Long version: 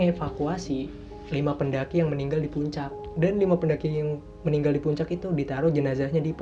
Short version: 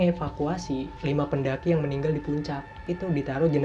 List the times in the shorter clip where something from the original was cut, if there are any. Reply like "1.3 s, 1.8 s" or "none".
0.9 s, 2.8 s